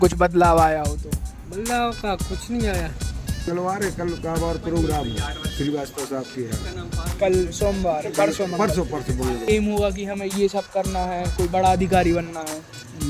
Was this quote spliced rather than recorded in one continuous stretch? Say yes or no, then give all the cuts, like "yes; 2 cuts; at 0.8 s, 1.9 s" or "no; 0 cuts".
yes; 2 cuts; at 3.5 s, 9.5 s